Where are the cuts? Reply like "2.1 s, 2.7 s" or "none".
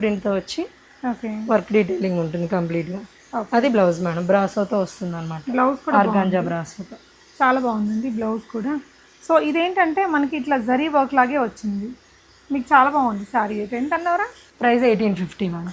none